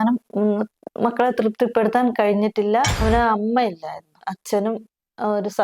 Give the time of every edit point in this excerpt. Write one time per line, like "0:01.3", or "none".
0:03.0
0:04.1